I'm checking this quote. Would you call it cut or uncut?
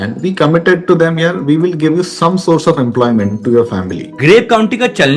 cut